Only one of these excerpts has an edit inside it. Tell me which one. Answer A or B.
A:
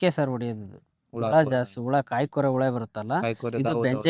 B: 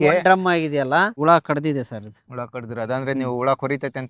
B